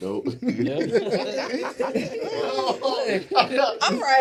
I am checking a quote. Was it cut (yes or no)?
no